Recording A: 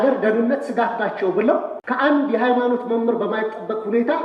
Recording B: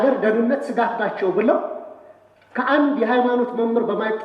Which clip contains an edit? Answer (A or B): A